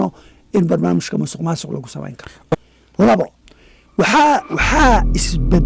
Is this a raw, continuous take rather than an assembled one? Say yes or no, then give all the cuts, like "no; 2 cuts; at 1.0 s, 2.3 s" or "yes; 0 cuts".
no; 1 cut; at 2.3 s